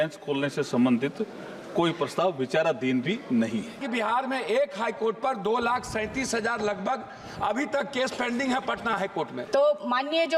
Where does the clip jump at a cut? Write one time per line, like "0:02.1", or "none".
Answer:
0:03.8
0:09.4